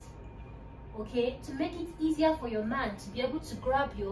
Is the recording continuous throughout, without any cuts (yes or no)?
yes